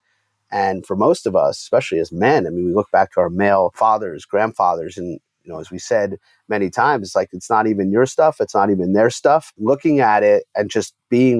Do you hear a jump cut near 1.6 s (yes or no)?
no